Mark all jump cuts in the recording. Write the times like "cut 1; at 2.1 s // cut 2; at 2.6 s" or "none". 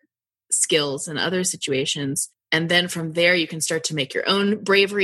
cut 1; at 2.3 s